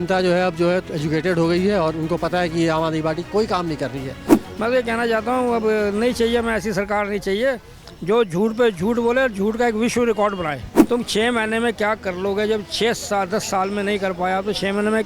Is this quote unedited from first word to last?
no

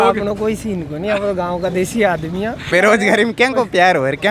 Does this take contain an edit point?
yes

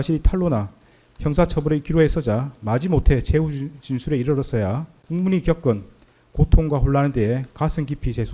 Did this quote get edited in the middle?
yes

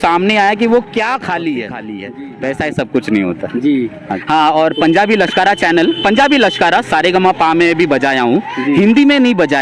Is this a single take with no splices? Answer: no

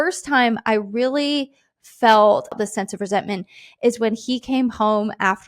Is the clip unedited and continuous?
no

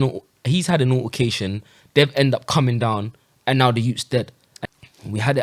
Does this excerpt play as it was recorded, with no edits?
no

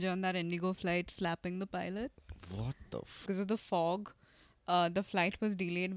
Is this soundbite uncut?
no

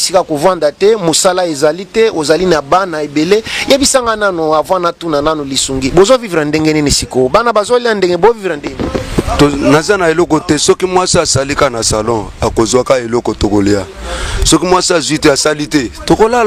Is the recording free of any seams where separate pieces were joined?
yes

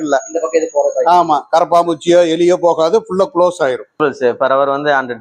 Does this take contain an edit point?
yes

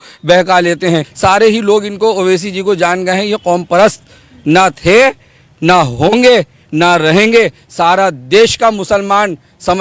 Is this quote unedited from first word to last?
no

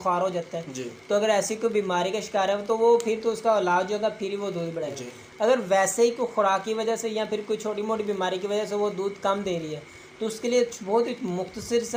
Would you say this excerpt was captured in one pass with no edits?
yes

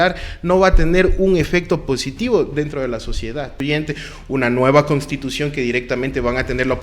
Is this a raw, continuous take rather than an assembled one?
no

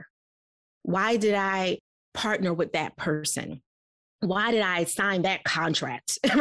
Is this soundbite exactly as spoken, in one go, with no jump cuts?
yes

